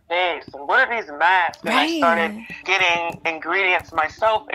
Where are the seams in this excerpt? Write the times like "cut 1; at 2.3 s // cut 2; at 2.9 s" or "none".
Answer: none